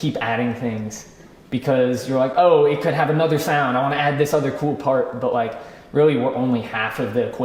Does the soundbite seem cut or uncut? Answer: uncut